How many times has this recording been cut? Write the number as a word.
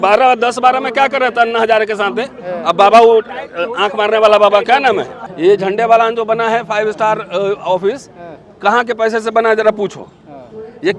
one